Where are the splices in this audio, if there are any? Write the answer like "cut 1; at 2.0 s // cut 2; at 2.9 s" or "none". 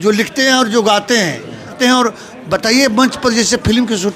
cut 1; at 1.7 s